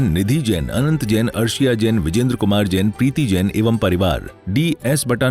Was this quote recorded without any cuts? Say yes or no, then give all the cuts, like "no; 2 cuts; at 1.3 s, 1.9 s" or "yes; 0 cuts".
no; 1 cut; at 4.3 s